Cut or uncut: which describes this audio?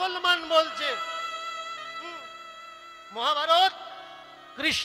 uncut